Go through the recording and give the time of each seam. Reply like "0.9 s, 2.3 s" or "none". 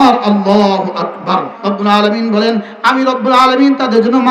1.6 s